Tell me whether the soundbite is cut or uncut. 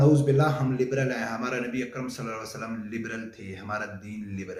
uncut